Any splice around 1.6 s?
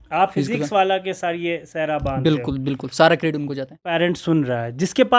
no; 1 cut; at 3.9 s

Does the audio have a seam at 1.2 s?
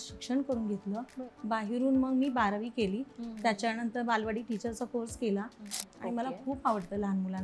no; 1 cut; at 5.8 s

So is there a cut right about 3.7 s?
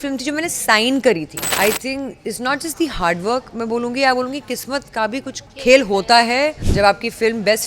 no; 3 cuts; at 1.4 s, 5.4 s, 6.6 s

